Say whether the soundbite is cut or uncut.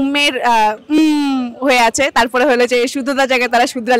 uncut